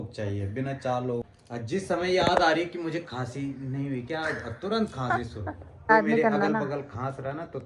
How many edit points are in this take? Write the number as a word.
two